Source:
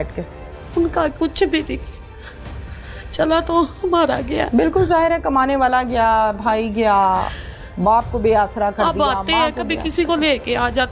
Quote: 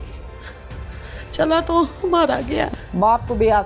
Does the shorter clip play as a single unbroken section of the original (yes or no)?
no